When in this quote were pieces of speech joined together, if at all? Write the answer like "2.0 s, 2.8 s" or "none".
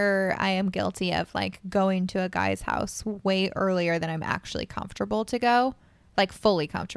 none